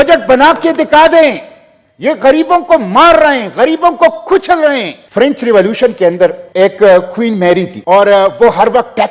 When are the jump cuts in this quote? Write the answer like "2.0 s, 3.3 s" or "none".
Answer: 5.0 s, 6.4 s, 7.7 s